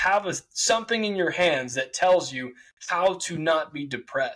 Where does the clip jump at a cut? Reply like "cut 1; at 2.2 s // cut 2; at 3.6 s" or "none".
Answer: none